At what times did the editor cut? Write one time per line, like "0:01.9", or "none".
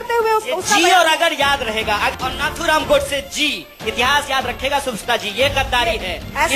0:02.1